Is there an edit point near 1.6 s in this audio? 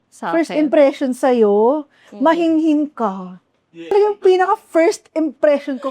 no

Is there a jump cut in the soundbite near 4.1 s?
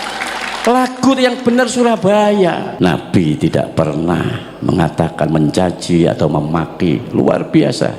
no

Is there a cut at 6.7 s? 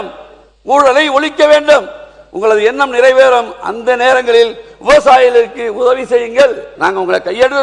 yes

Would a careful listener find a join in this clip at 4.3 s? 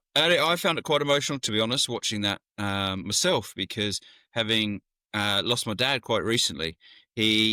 no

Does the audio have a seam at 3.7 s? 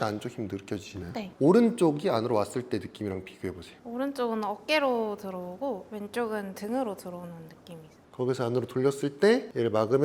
yes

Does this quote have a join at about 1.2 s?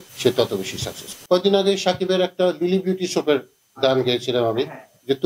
no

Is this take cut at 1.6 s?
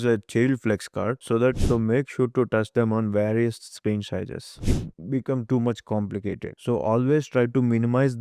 yes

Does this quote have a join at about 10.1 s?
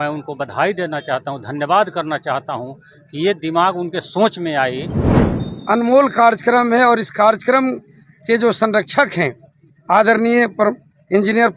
no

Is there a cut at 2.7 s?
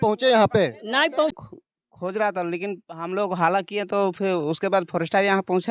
no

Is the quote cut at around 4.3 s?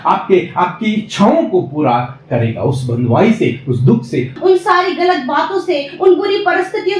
yes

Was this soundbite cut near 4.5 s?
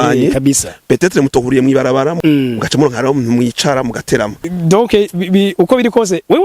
yes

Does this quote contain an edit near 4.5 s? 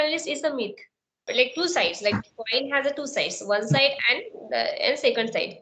no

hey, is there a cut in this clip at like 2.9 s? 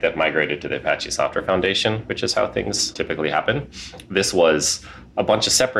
yes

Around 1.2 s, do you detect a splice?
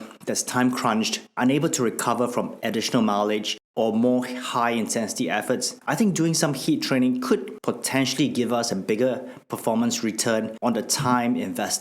no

